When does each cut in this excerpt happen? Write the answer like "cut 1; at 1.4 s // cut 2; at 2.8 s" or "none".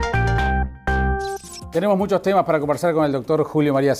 cut 1; at 1.4 s